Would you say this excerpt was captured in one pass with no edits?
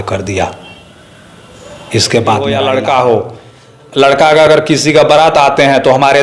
no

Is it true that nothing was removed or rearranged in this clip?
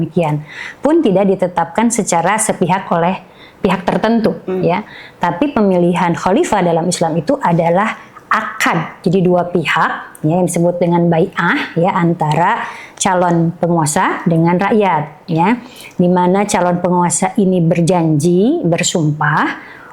yes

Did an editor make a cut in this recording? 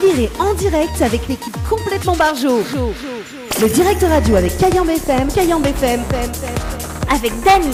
no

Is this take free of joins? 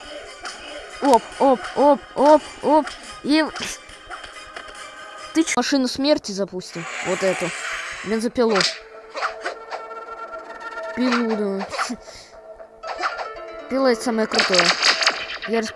no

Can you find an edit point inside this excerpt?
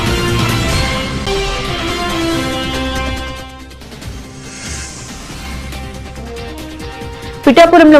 yes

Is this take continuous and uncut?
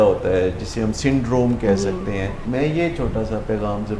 no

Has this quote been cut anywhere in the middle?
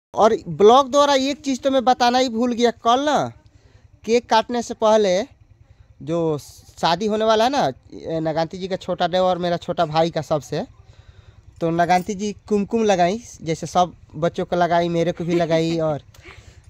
no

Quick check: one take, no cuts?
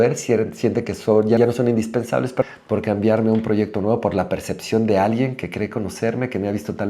no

